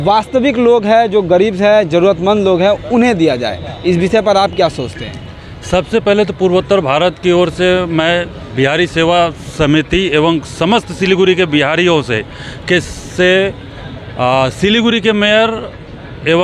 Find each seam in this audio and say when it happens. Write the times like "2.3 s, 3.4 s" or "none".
none